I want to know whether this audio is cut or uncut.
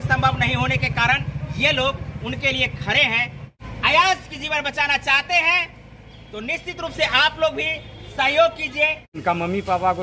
cut